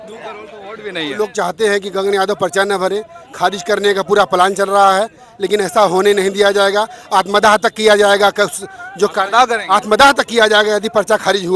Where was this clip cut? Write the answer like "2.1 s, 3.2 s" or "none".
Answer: 1.2 s